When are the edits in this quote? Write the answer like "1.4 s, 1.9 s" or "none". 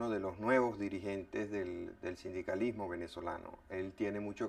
3.5 s

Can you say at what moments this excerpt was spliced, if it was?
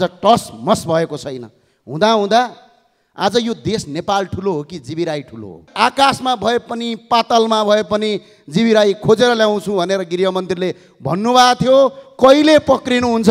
5.7 s

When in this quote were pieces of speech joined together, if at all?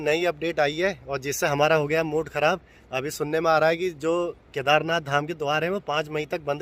none

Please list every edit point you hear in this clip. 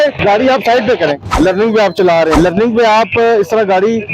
1.2 s, 2.3 s

